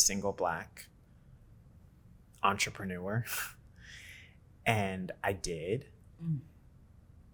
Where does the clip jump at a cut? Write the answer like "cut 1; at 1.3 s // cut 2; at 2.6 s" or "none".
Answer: none